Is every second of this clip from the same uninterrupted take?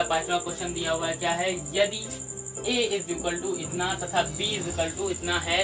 yes; 0 cuts

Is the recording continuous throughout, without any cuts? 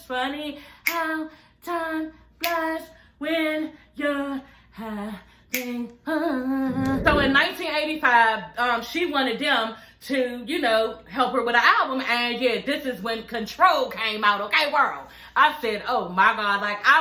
no; 1 cut; at 7.0 s

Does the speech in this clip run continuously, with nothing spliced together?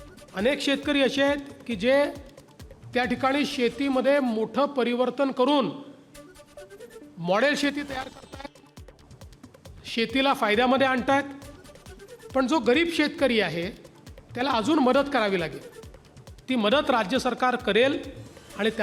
yes; 0 cuts

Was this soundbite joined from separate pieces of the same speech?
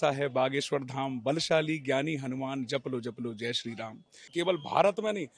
yes; 1 cut; at 4.2 s

